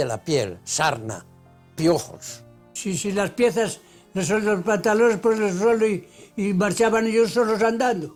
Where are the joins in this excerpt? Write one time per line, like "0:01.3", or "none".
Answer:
none